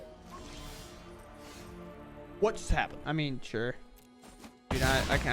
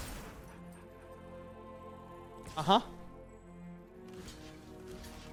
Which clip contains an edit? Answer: first; 1 cut; at 3.0 s

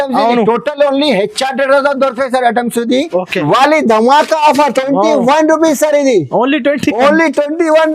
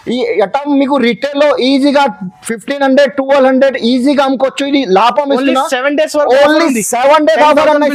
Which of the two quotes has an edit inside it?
first; 1 cut; at 3.4 s

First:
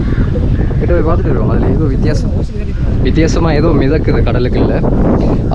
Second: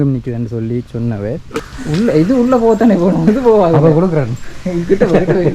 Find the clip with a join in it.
second; 1 cut; at 1.7 s

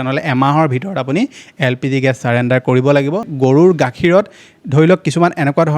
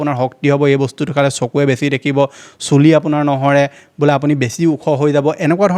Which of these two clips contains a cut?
first; 1 cut; at 3.3 s

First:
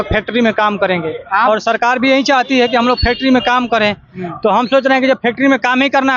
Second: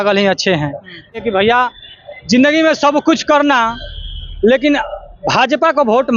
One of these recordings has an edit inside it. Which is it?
second; 1 cut; at 1.2 s

